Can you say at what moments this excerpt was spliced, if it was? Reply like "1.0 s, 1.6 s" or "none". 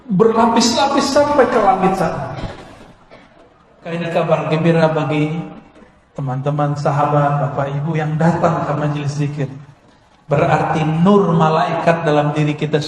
4.0 s